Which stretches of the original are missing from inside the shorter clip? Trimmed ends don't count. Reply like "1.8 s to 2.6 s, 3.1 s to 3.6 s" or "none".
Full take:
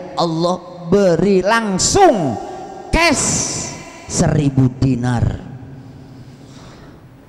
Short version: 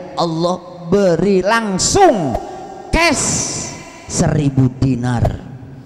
none